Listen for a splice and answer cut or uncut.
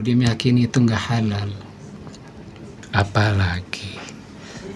cut